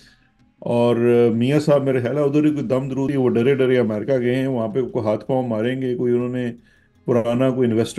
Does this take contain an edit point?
yes; 1 cut; at 3.1 s

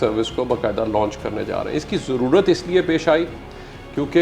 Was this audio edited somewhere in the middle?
no; 0 cuts

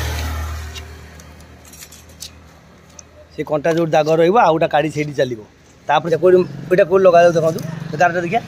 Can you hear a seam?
yes; 1 cut; at 6.0 s

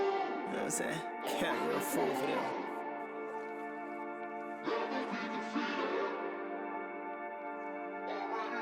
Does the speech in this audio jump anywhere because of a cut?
no; 0 cuts

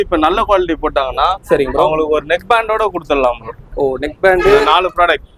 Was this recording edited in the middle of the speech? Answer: no; 0 cuts

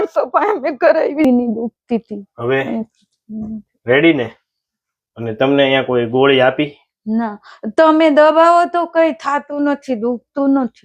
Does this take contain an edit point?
yes; 1 cut; at 1.2 s

